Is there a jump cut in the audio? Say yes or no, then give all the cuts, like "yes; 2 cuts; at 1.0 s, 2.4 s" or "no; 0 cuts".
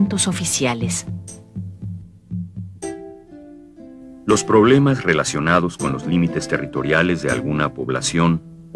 no; 0 cuts